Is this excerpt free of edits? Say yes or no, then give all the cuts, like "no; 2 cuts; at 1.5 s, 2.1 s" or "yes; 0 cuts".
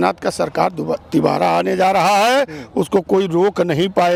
yes; 0 cuts